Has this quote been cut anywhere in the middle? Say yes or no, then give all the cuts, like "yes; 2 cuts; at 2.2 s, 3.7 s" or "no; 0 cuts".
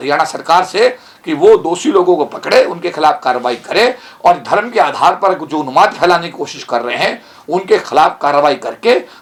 no; 0 cuts